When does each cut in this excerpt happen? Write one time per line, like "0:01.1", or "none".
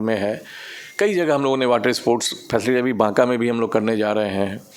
none